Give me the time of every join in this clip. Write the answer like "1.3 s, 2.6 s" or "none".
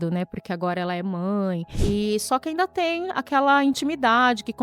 1.7 s

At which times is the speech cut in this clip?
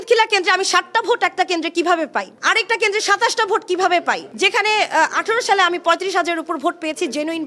2.3 s, 4.3 s

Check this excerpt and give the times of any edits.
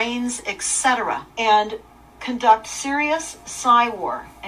1.3 s

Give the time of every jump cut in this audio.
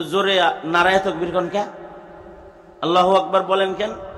none

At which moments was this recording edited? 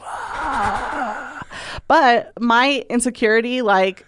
2.3 s

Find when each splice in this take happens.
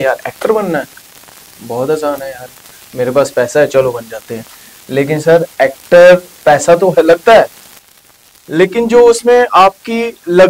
none

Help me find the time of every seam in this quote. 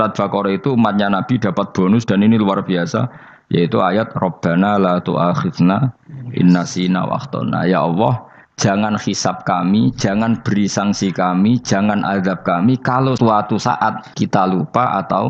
13.2 s, 14.0 s

